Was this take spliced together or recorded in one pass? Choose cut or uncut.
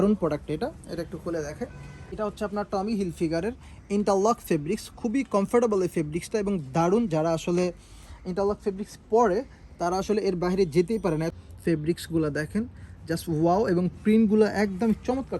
cut